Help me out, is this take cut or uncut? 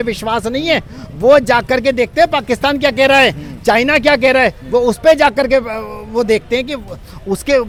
uncut